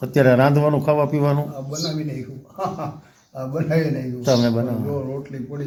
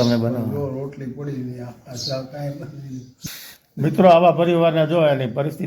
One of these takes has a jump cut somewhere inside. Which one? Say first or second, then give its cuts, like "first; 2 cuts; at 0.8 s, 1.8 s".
second; 1 cut; at 3.2 s